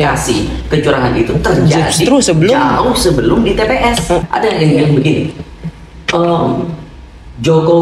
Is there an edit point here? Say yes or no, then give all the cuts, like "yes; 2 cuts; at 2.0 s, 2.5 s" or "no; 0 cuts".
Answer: yes; 1 cut; at 4.2 s